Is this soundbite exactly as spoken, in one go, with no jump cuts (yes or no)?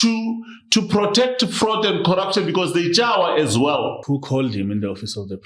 no